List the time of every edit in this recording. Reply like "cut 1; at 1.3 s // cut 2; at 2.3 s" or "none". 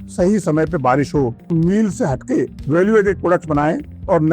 cut 1; at 1.5 s